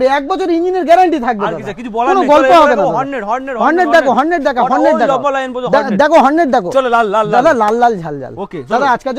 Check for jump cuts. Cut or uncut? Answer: uncut